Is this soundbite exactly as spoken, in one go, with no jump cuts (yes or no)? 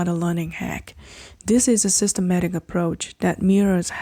yes